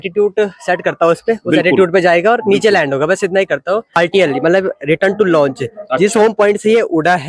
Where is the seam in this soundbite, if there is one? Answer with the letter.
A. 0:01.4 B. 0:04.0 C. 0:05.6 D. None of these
B